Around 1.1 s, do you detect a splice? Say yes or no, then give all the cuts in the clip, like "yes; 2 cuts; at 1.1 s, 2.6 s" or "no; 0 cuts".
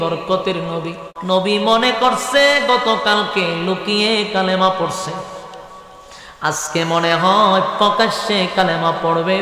yes; 1 cut; at 1.1 s